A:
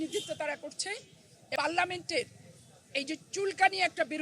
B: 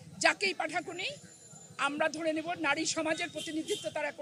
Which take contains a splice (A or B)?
A